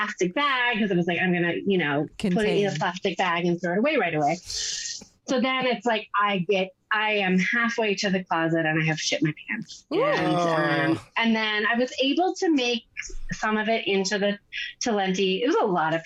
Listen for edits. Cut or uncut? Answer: uncut